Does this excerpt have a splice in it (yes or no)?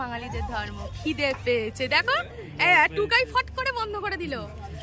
no